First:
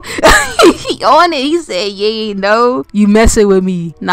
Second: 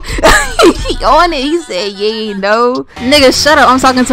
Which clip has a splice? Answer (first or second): second